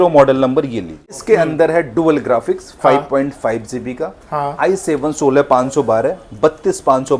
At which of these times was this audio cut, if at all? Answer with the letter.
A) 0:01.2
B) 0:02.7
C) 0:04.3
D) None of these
A